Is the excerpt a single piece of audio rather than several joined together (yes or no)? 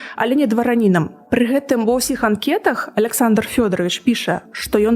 no